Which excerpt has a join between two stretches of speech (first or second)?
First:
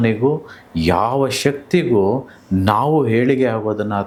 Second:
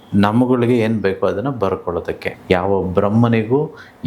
second